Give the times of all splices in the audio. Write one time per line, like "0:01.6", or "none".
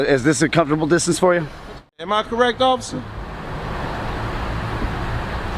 0:02.0